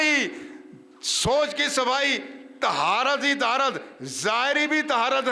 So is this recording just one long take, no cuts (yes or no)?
yes